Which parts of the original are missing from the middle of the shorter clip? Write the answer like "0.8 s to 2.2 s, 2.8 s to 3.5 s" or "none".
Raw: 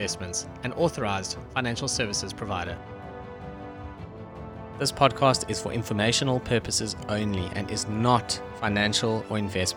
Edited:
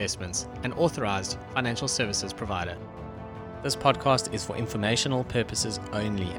2.9 s to 4.1 s